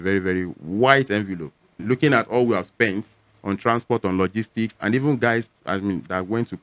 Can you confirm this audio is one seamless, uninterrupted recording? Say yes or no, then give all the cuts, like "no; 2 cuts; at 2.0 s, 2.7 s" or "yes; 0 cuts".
no; 1 cut; at 1.7 s